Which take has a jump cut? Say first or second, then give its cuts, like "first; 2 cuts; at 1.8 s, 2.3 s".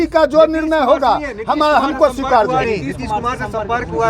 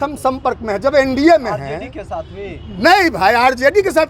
first; 1 cut; at 2.7 s